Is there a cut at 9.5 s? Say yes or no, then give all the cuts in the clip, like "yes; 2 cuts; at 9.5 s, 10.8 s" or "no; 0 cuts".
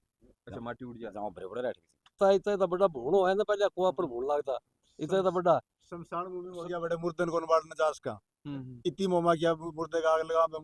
no; 1 cut; at 2.1 s